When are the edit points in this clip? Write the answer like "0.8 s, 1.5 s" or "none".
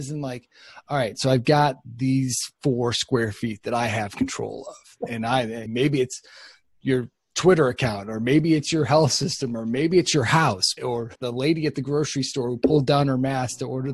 5.7 s, 10.8 s